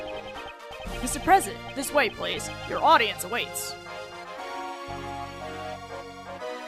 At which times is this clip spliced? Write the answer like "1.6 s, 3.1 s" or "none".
1.7 s